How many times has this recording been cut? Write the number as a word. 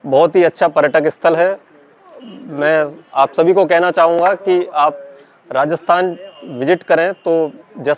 zero